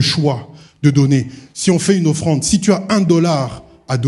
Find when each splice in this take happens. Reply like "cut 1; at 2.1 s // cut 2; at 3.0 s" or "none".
none